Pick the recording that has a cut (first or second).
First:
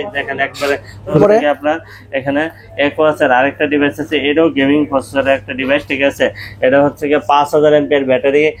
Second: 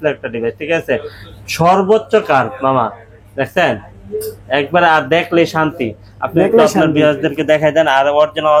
first